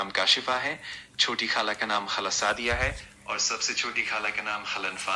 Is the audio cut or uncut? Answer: uncut